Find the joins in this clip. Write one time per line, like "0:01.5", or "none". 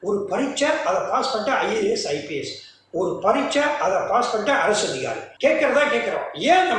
0:05.2